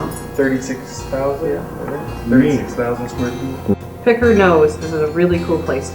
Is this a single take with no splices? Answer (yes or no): no